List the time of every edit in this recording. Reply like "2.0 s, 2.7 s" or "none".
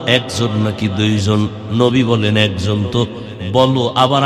none